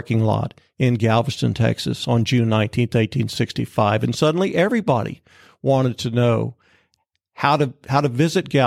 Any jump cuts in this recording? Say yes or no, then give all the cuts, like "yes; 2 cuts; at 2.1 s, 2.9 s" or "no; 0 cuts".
no; 0 cuts